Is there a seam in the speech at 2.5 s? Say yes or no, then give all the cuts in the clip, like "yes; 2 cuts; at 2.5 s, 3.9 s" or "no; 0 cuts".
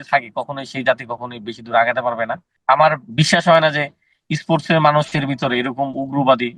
yes; 1 cut; at 2.5 s